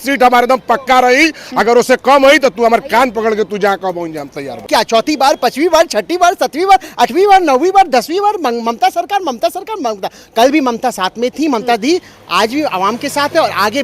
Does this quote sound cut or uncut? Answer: cut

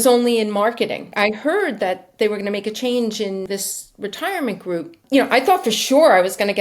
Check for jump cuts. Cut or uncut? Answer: cut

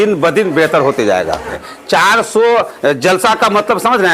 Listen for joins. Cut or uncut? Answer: cut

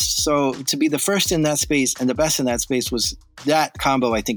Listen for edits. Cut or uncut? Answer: uncut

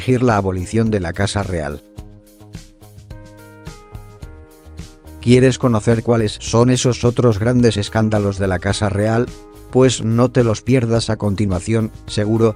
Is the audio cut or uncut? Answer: uncut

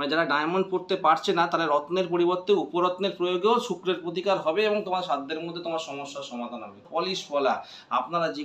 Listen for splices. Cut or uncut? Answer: cut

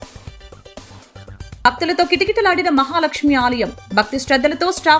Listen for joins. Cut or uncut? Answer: cut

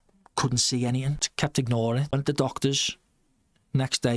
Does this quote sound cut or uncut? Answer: cut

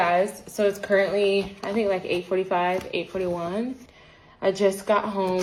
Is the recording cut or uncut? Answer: uncut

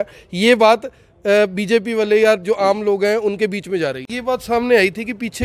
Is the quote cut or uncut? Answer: cut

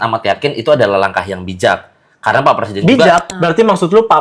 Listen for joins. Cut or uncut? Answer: cut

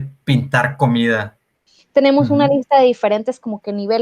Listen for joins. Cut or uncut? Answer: cut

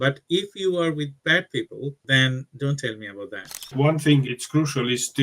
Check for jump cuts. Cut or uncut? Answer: cut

